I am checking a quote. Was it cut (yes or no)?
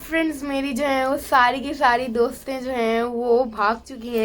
no